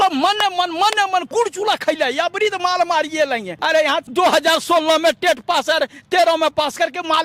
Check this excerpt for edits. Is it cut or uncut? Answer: cut